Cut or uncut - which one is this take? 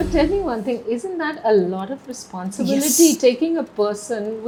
uncut